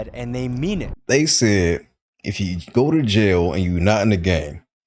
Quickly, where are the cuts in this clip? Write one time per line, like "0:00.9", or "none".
0:00.9

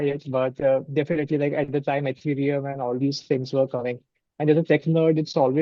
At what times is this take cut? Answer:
none

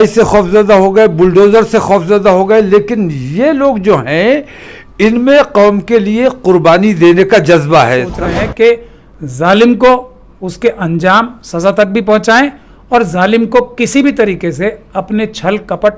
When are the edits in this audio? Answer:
0:08.1

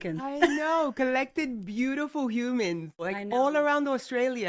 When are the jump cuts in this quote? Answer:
0:03.1

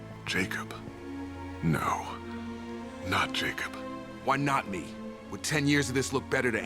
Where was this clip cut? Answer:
none

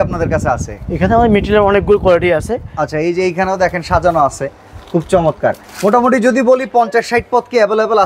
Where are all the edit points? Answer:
none

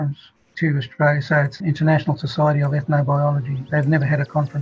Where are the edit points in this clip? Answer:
0:01.6
0:03.6

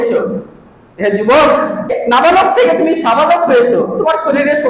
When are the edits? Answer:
0:02.0

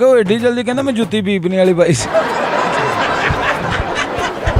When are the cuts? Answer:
none

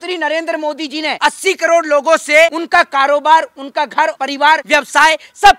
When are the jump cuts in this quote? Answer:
0:01.2
0:02.6
0:04.5

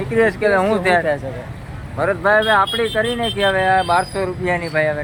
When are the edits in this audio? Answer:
none

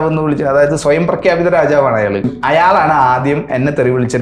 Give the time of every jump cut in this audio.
0:02.3

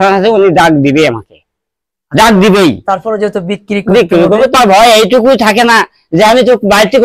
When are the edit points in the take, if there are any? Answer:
0:04.5

